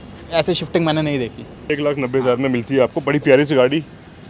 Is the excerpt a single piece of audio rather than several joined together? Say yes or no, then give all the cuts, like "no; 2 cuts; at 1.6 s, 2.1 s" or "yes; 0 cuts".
no; 1 cut; at 1.6 s